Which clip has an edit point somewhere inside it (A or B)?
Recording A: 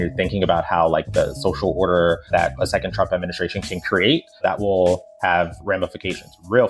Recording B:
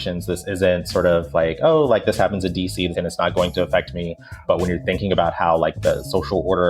B